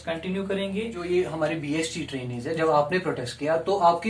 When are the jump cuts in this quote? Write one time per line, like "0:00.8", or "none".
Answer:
0:01.0